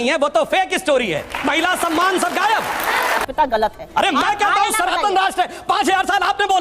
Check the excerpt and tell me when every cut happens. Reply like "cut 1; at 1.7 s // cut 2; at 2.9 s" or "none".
cut 1; at 3.2 s